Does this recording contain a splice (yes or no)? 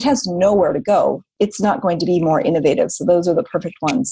yes